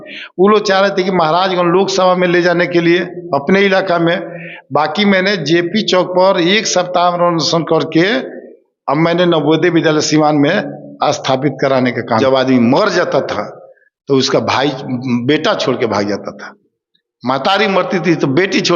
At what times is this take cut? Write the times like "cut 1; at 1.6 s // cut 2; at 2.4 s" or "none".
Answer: cut 1; at 12.2 s